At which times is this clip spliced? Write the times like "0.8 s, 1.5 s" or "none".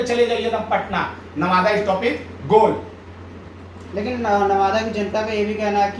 none